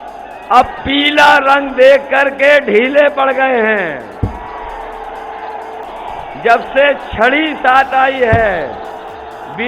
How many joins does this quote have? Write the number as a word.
one